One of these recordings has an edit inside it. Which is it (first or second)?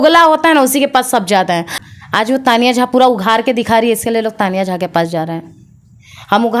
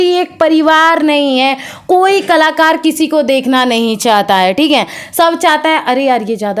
first